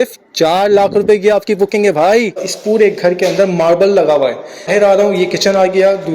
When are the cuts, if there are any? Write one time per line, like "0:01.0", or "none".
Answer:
0:02.5
0:04.7